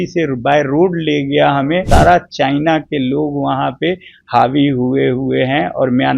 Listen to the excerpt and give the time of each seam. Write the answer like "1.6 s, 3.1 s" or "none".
1.8 s